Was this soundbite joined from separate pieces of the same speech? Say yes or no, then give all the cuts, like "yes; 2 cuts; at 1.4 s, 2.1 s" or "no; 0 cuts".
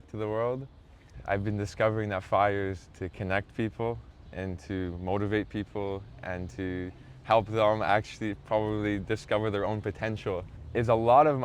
yes; 2 cuts; at 1.1 s, 10.5 s